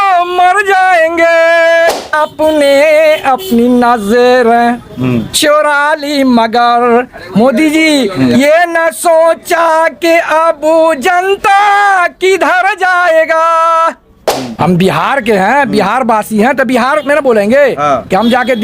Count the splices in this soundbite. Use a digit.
2